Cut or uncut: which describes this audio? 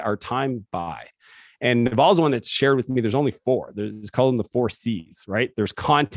uncut